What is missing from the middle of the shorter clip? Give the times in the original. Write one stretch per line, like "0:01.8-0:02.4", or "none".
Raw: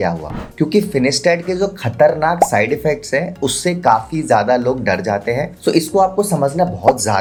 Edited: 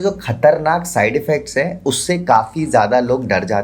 none